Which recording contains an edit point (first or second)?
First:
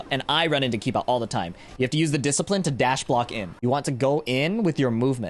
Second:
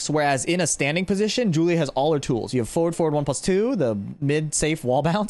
first